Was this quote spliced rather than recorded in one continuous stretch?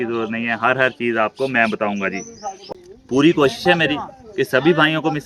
yes; 1 cut; at 2.6 s

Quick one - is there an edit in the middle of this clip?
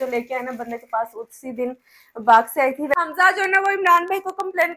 yes; 1 cut; at 2.9 s

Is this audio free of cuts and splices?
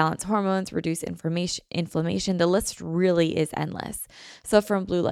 yes; 0 cuts

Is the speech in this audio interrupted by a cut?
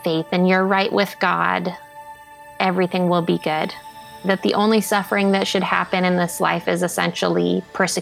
yes; 1 cut; at 4.2 s

